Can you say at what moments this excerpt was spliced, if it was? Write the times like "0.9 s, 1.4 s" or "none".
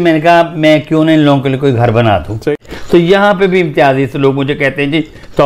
2.4 s